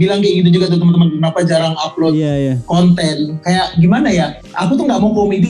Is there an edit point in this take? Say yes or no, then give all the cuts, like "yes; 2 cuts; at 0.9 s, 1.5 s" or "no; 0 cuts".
yes; 1 cut; at 4.4 s